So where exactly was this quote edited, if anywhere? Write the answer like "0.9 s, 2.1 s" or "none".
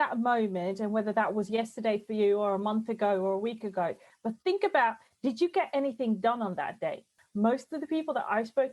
4.1 s, 7.2 s